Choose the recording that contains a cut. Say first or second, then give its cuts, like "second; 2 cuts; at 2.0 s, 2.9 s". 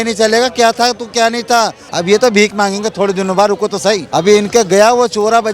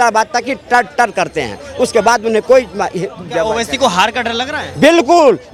first; 2 cuts; at 1.9 s, 4.0 s